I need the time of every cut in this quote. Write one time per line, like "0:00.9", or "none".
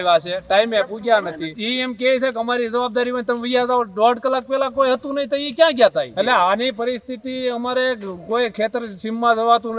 0:01.6
0:06.1